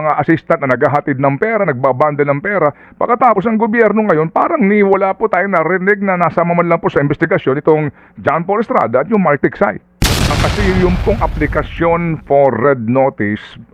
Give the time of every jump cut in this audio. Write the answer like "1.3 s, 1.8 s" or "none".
10.4 s